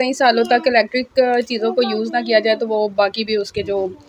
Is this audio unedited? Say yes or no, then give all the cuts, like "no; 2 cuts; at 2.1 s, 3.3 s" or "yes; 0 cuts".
yes; 0 cuts